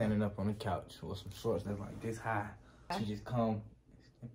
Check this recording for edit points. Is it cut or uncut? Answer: cut